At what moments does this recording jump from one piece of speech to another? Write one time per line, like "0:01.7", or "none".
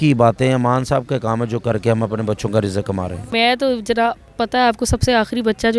0:03.2